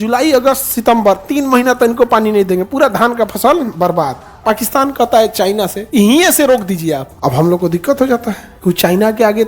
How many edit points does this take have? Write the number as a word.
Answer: four